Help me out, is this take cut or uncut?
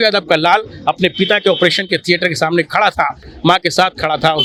uncut